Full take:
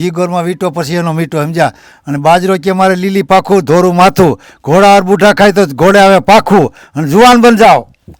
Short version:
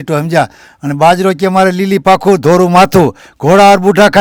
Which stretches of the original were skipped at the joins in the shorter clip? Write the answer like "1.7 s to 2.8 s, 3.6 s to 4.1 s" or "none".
none